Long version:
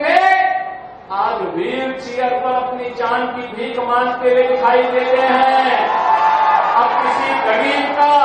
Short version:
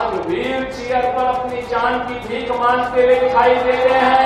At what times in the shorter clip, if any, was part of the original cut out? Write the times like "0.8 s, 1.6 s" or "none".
none